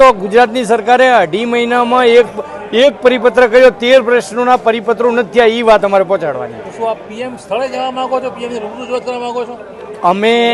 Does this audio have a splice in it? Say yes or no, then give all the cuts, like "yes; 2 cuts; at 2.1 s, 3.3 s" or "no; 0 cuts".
no; 0 cuts